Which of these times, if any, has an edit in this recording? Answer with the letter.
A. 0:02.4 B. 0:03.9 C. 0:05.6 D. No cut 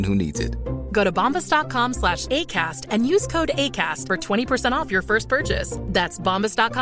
D